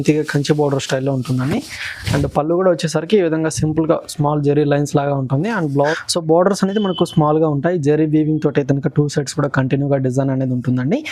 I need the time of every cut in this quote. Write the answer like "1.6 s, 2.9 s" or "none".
5.9 s

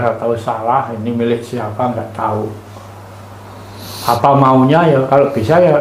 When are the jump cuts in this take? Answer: none

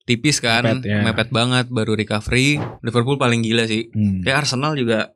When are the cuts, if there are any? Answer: 2.7 s

